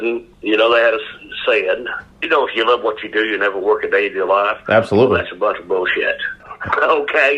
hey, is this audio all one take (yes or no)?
no